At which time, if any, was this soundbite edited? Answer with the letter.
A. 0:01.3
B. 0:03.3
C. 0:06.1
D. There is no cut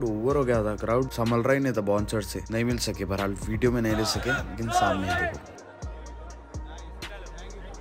D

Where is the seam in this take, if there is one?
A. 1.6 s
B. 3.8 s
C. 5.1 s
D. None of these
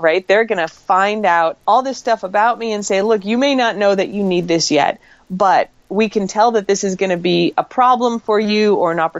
A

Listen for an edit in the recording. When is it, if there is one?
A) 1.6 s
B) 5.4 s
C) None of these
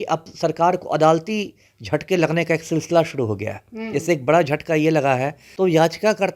B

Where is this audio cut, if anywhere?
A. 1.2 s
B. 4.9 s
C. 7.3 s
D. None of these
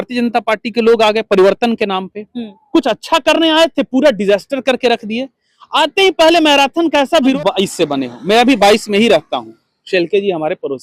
C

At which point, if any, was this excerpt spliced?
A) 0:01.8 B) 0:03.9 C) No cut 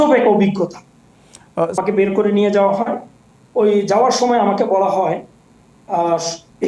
A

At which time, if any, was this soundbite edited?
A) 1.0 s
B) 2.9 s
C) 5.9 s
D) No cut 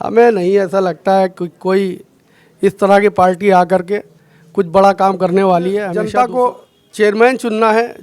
C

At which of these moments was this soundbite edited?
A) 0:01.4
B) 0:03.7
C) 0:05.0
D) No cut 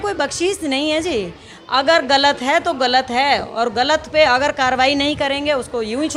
D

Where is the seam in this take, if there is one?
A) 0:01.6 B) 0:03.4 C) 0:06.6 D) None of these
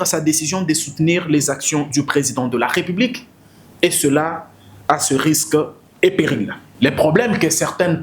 C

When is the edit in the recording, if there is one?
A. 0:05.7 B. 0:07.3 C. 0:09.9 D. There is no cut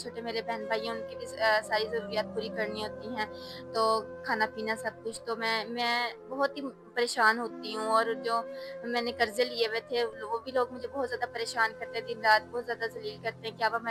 D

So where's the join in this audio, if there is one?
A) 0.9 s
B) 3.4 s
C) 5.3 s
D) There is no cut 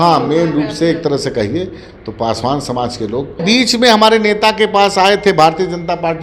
B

